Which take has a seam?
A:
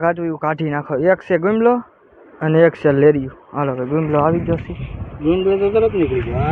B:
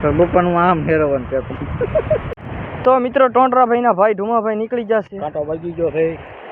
B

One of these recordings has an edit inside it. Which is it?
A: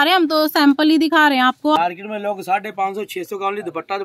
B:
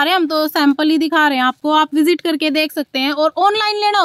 A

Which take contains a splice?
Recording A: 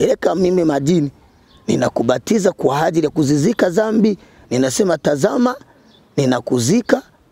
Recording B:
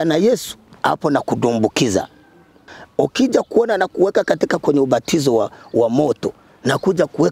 B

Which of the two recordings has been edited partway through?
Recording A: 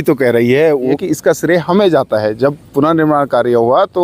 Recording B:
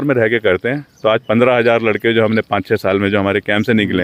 A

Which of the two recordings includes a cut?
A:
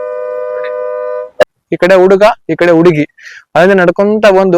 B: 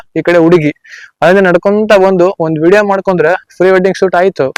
A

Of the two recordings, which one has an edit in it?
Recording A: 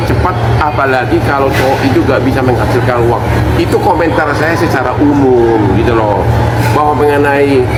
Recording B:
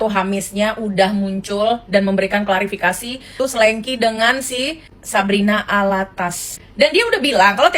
B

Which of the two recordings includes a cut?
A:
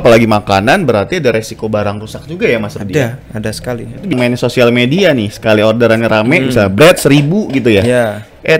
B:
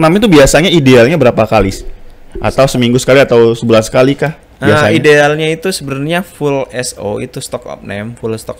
A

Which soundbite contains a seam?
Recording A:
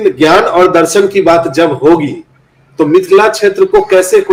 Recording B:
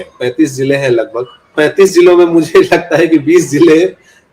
B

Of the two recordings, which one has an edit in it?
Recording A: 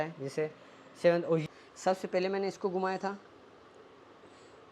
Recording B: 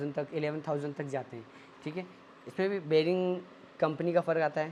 A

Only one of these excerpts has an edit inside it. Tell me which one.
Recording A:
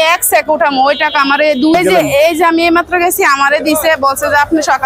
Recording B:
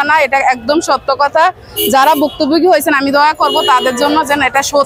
A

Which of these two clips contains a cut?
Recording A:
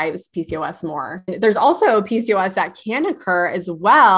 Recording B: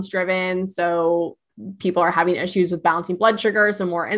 A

